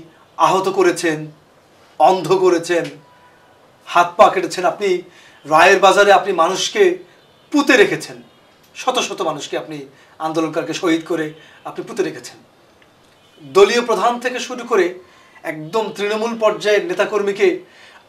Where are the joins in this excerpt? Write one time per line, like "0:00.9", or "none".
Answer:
none

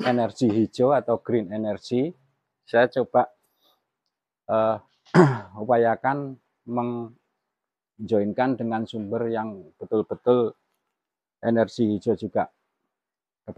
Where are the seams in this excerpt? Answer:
none

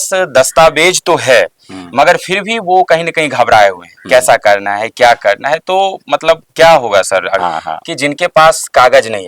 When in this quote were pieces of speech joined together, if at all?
0:07.3

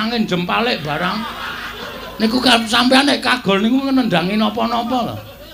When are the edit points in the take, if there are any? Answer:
none

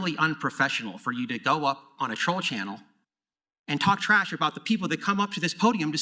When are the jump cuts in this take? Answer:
none

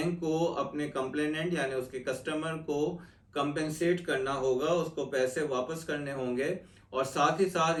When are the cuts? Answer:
none

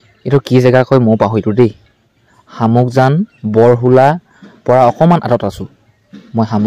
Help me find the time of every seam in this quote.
none

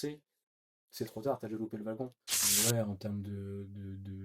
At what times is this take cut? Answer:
0:02.3

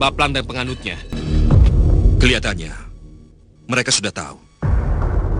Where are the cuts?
0:01.1

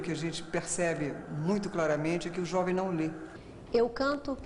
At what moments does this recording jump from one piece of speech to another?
none

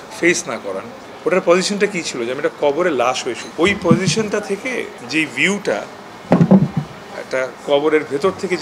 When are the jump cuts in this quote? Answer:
0:00.9
0:03.5
0:05.0
0:07.6

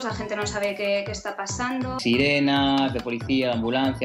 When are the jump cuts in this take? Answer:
0:02.0

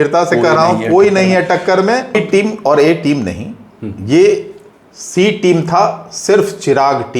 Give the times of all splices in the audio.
0:02.2

